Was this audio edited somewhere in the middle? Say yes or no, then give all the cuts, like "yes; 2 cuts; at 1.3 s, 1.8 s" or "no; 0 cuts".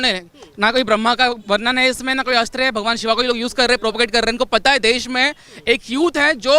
no; 0 cuts